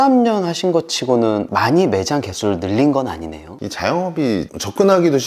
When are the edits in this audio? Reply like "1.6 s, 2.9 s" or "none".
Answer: 3.5 s